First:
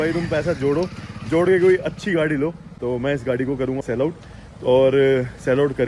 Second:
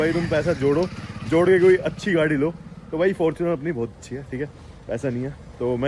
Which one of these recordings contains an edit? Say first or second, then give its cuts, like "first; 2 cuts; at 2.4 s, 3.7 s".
first; 2 cuts; at 2.7 s, 3.8 s